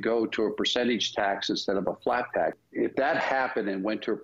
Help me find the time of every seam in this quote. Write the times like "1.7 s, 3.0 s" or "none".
2.6 s

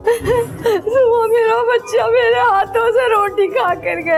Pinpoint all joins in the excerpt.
none

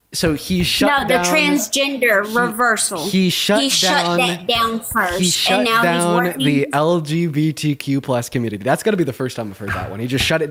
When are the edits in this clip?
none

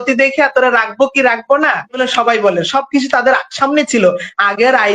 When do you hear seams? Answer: 2.0 s

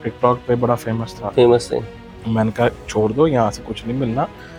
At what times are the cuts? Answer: none

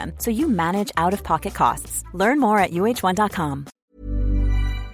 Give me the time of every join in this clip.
3.8 s

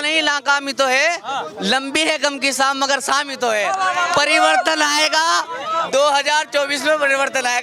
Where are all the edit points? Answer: none

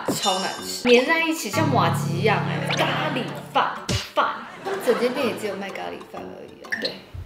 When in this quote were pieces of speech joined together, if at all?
2.7 s, 4.5 s

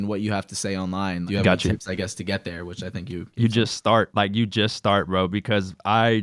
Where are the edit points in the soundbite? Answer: none

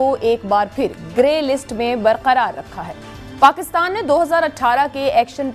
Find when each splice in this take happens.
none

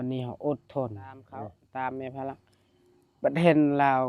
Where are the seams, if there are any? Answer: 1.6 s

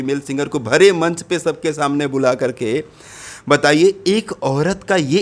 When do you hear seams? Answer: none

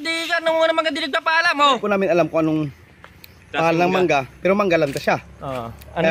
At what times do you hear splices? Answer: 1.8 s

